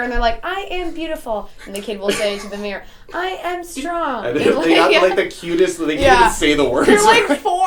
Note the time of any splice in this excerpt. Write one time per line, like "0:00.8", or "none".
none